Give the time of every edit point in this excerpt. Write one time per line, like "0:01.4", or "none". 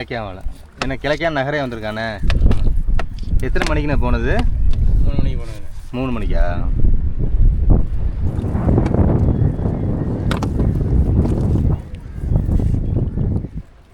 none